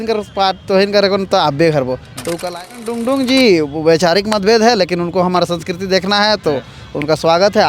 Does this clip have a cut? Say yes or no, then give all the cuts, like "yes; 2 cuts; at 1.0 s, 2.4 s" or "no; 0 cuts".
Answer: yes; 1 cut; at 3.0 s